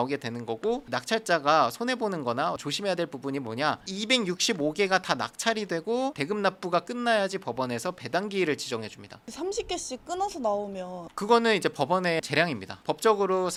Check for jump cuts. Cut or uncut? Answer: uncut